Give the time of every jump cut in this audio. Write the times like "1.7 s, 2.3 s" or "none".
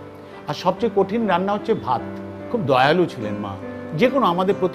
2.4 s, 3.8 s